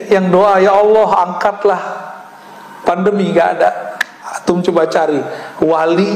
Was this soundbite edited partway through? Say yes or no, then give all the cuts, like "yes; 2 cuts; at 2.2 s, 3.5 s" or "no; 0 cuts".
no; 0 cuts